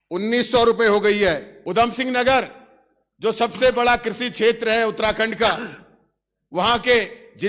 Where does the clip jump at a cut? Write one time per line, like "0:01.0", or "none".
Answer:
0:01.5

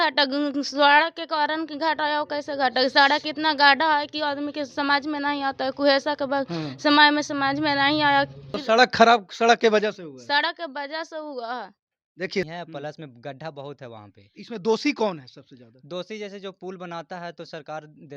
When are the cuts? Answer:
0:08.6
0:12.5

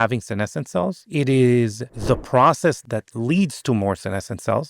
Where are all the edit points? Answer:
0:01.0
0:01.9
0:02.8

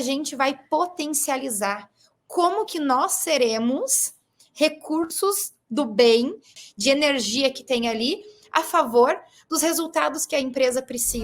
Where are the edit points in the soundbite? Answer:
0:06.5

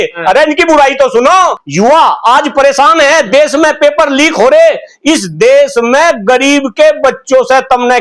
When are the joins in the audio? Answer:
0:01.6

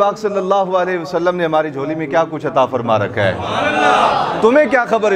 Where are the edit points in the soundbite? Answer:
none

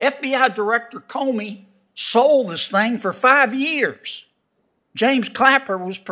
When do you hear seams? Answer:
none

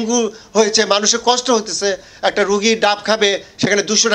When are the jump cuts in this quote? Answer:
none

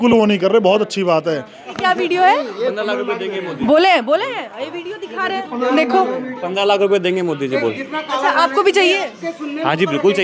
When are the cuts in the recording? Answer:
0:01.7

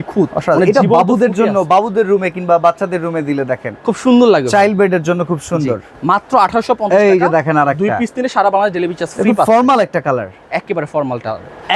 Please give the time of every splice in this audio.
none

